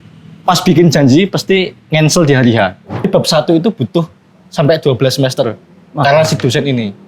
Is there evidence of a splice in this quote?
yes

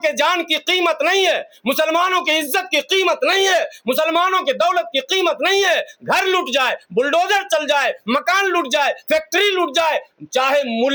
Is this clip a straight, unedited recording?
yes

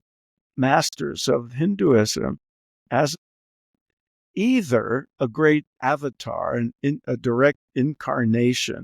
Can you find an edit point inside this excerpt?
yes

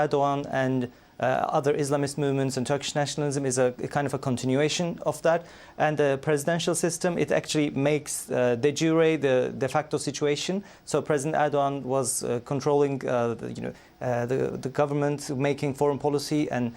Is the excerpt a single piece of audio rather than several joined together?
no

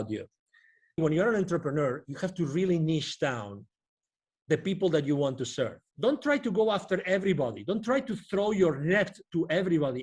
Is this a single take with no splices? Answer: no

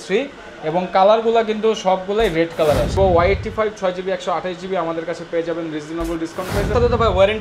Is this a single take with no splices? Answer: no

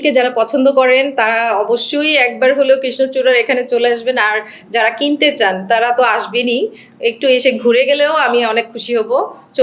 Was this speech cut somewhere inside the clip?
no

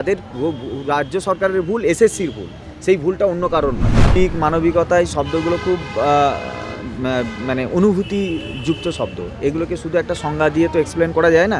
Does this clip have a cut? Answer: yes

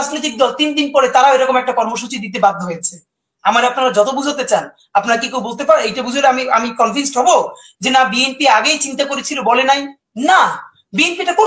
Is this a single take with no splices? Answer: yes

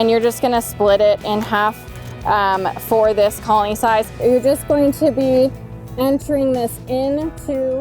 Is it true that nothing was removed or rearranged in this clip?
no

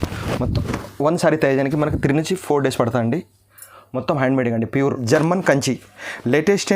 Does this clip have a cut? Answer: yes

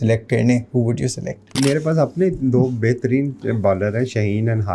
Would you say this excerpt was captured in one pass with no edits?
no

